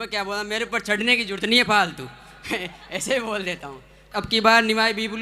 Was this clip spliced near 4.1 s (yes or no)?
yes